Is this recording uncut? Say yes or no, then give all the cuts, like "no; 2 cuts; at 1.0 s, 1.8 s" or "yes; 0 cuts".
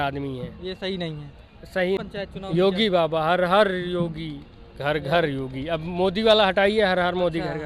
no; 1 cut; at 2.0 s